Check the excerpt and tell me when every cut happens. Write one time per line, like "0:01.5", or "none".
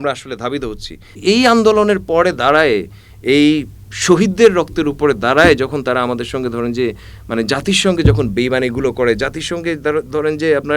0:01.1